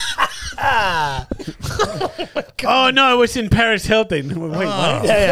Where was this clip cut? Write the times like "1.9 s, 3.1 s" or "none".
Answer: 1.4 s